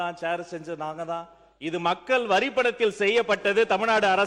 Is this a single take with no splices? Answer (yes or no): yes